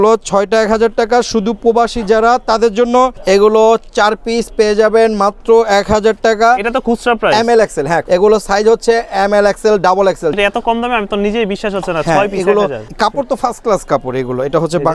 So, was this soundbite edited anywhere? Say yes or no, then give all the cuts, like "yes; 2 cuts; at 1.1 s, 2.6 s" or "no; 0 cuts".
yes; 4 cuts; at 3.2 s, 8.0 s, 10.3 s, 12.8 s